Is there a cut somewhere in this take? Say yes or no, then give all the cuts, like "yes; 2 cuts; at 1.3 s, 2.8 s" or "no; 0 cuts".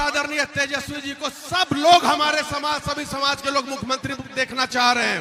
no; 0 cuts